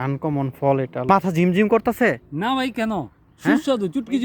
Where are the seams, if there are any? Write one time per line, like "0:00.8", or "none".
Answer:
0:01.1